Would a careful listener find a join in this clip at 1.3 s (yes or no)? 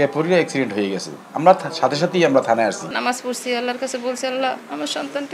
no